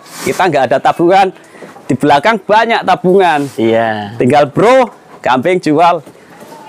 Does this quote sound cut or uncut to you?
uncut